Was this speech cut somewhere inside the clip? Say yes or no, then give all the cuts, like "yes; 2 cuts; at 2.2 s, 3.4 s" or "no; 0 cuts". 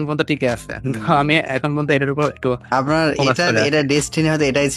no; 0 cuts